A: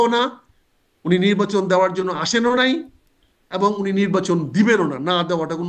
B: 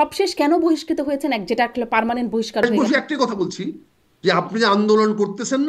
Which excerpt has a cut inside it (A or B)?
B